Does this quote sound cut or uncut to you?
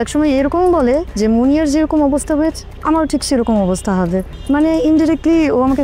uncut